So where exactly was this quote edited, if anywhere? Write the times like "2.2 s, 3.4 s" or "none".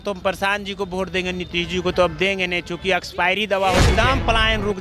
3.9 s